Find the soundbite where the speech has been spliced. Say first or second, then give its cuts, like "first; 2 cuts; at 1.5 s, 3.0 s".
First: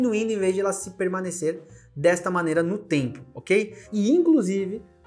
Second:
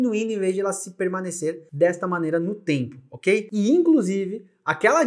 second; 2 cuts; at 1.6 s, 3.5 s